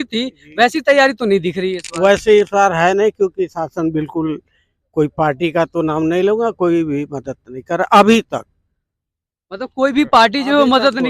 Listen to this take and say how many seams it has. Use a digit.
0